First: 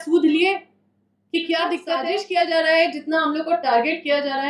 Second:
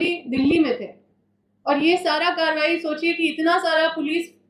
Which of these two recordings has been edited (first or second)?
first